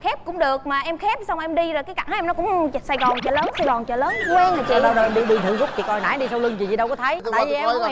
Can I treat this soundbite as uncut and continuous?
yes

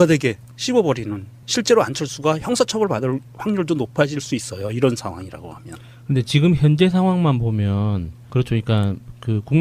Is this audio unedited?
yes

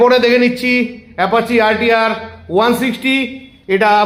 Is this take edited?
no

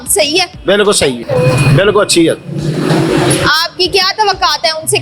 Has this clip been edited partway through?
no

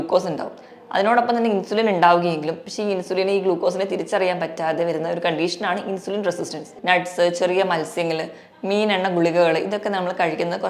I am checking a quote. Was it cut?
yes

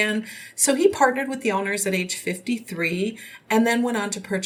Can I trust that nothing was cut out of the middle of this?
yes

